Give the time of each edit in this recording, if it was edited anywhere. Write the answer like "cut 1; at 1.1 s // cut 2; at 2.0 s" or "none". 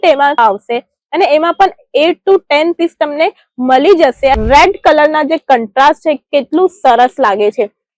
cut 1; at 4.4 s